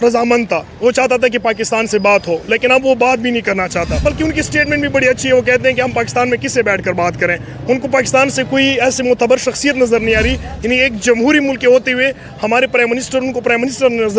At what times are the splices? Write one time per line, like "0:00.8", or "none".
0:04.0